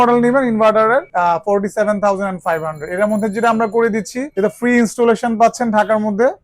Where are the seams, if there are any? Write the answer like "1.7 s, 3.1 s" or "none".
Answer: 1.1 s, 4.2 s